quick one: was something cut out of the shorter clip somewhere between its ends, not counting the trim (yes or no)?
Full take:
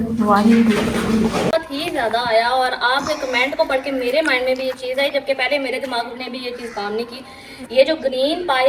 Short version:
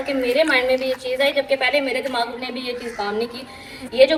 no